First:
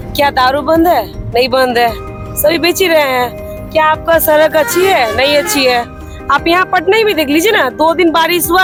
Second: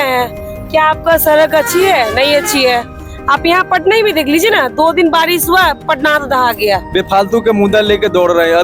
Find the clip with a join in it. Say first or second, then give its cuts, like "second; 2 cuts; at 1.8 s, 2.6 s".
second; 1 cut; at 6.9 s